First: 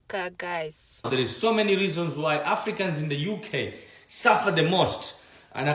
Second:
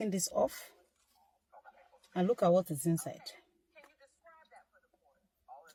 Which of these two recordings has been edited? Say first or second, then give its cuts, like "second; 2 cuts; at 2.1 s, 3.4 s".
first; 1 cut; at 1.1 s